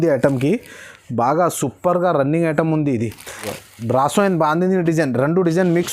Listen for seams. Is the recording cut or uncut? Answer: cut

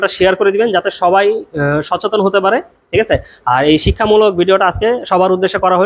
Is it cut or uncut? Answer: uncut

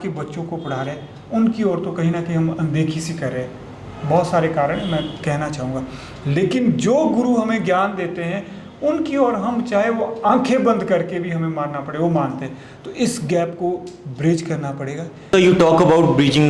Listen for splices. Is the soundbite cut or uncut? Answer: cut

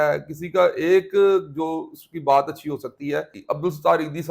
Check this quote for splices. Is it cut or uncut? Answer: cut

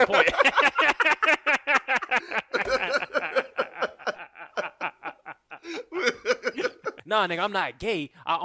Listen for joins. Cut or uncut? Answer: cut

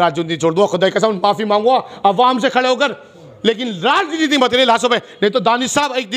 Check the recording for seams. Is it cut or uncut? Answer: uncut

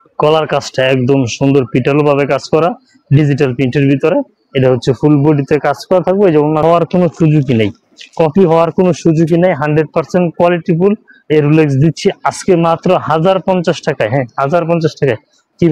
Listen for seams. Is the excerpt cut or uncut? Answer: cut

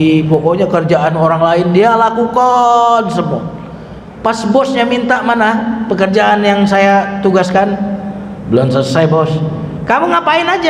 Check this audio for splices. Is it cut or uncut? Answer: uncut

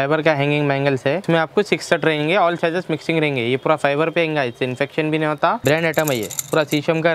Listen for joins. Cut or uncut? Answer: cut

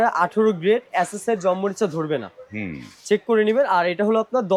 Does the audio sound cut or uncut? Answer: uncut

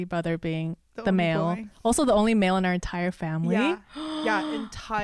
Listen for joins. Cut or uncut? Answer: uncut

